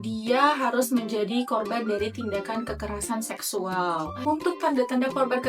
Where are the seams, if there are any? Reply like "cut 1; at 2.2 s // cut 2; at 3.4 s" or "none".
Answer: cut 1; at 4.1 s